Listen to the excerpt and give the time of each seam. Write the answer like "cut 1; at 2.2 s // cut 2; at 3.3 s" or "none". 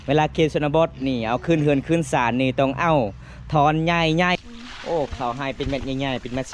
cut 1; at 4.3 s

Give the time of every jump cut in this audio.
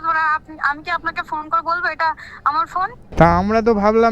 cut 1; at 3.0 s

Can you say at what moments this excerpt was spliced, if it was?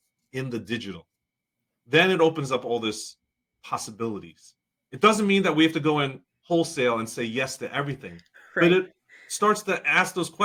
none

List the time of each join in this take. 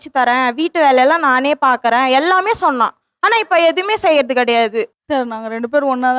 cut 1; at 4.9 s

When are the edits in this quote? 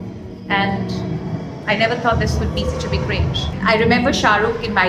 cut 1; at 3.5 s

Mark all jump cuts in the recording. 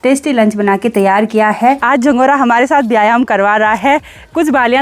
cut 1; at 1.8 s

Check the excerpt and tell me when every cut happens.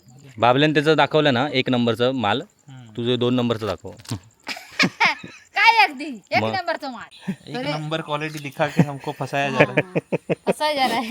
cut 1; at 7.0 s

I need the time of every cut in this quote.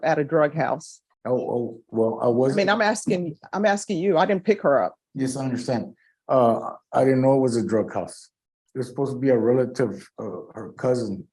none

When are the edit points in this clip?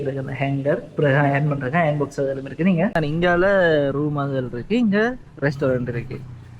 cut 1; at 2.9 s

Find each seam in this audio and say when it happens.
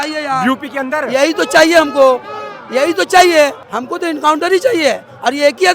cut 1; at 3.6 s

